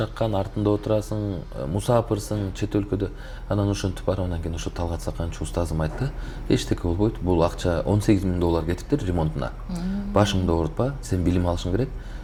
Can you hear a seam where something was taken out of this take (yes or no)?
no